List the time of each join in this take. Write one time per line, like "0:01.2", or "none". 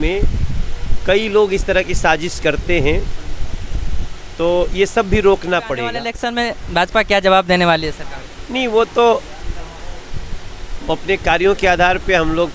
0:06.1

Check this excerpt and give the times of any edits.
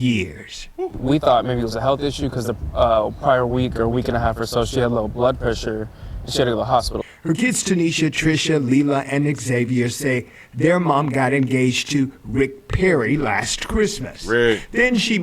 none

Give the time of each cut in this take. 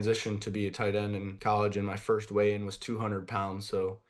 0:01.3

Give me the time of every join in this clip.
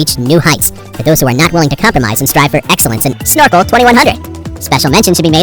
0:03.2

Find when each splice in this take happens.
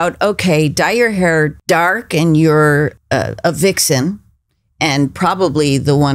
0:01.6
0:03.0

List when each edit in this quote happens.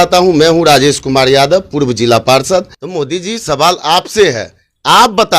0:02.8

